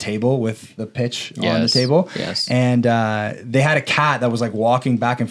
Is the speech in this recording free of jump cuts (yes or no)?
yes